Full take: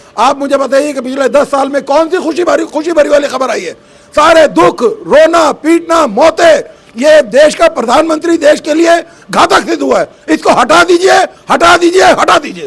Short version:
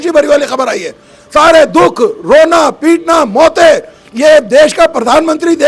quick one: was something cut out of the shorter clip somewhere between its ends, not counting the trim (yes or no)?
no